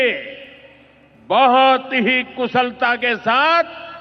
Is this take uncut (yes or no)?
yes